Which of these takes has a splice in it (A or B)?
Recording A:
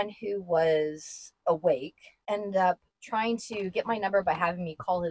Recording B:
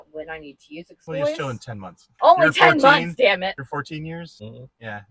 B